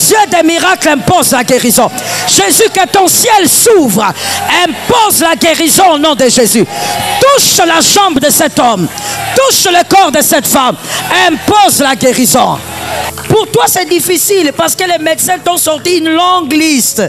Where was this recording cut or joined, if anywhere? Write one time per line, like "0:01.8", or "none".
0:13.1